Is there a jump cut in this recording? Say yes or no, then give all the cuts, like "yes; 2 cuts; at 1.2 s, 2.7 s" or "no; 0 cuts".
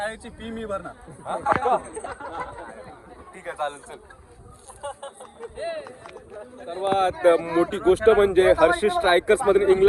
yes; 1 cut; at 6.6 s